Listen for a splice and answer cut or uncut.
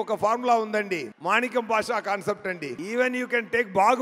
cut